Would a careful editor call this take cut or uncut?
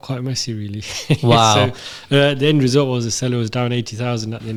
uncut